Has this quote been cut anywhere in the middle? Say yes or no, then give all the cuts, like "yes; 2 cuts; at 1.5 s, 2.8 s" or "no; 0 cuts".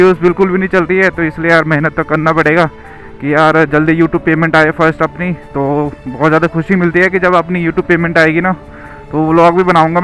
no; 0 cuts